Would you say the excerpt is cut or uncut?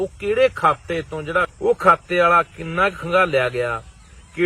cut